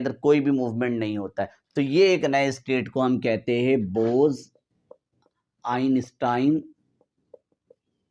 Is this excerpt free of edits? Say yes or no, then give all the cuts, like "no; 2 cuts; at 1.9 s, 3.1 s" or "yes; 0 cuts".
yes; 0 cuts